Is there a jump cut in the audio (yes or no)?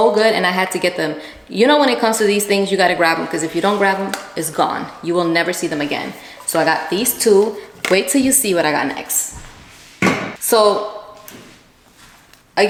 no